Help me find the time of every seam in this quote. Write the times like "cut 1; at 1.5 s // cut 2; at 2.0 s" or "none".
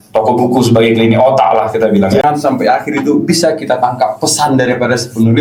cut 1; at 2.2 s